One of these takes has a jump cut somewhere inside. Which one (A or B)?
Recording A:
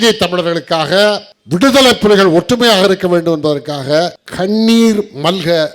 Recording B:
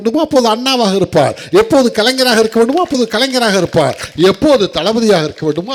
A